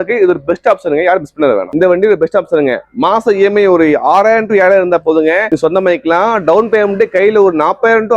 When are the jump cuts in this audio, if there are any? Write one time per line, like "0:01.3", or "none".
0:01.7